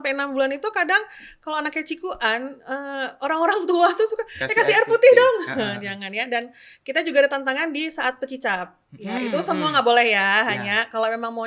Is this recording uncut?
yes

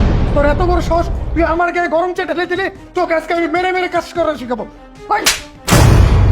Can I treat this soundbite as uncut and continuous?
no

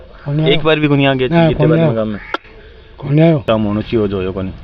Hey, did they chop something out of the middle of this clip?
yes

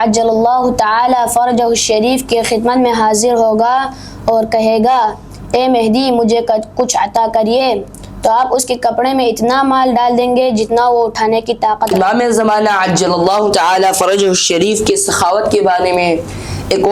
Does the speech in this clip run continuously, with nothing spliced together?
no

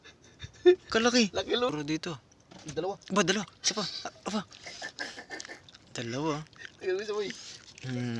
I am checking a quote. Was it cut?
yes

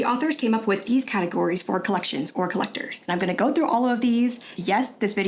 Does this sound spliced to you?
no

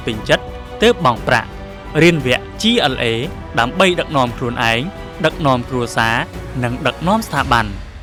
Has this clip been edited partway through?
no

